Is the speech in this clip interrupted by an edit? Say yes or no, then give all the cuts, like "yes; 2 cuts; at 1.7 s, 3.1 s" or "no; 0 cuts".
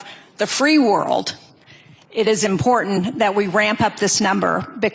no; 0 cuts